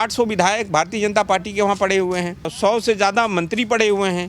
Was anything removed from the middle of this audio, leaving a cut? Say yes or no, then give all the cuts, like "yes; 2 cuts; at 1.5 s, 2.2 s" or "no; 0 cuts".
yes; 1 cut; at 2.5 s